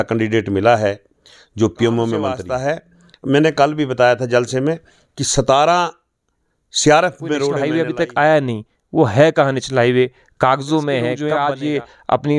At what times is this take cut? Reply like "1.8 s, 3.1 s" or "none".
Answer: 2.5 s, 7.6 s, 11.2 s